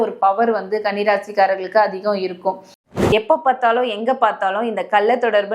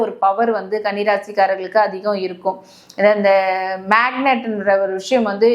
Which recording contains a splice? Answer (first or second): first